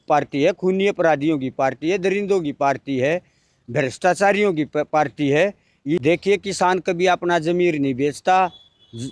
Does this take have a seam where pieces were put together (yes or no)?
yes